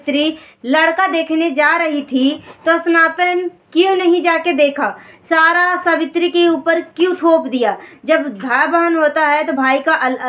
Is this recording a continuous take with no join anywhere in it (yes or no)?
yes